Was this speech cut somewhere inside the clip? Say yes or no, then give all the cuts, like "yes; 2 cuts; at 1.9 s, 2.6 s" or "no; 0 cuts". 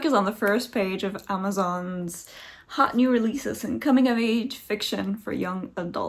no; 0 cuts